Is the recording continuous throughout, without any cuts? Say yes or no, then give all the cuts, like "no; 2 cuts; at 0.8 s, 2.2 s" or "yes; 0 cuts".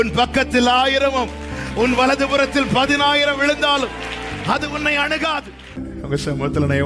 no; 1 cut; at 5.9 s